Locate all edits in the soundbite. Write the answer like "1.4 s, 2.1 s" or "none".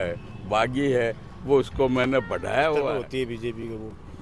2.9 s